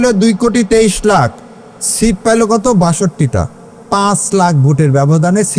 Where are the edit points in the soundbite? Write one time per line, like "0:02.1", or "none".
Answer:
none